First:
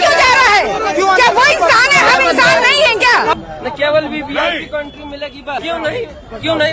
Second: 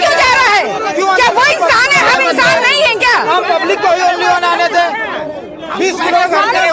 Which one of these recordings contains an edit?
first; 2 cuts; at 3.3 s, 5.6 s

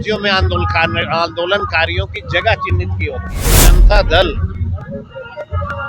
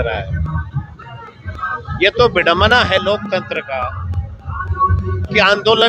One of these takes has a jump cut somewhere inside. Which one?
first; 1 cut; at 3.7 s

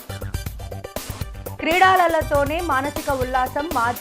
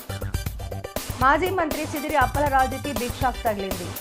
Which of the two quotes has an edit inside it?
first; 1 cut; at 1.1 s

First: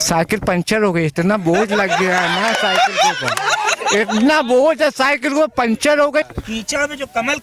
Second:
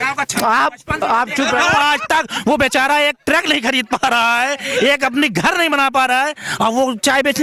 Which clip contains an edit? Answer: first; 1 cut; at 6.2 s

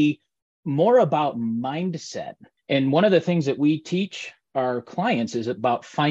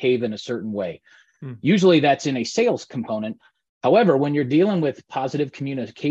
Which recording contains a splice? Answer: first; 1 cut; at 2.5 s

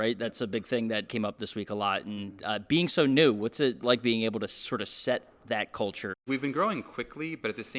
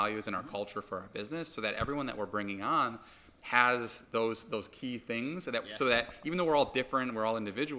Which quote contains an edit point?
first; 3 cuts; at 1.1 s, 3.8 s, 6.1 s

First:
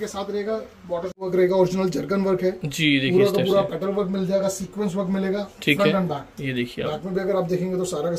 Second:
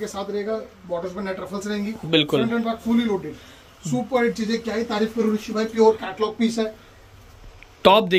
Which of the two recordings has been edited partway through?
first; 1 cut; at 1.3 s

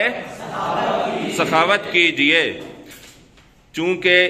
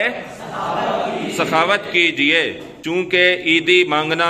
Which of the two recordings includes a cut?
second; 1 cut; at 2.7 s

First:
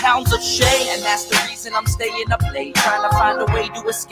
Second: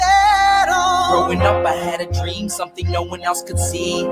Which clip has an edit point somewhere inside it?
second; 1 cut; at 1.0 s

